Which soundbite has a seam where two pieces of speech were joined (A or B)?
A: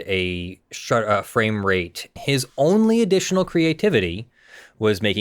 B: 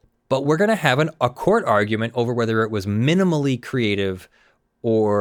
A